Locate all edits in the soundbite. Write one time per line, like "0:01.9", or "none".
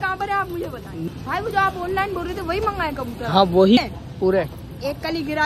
0:01.0
0:03.8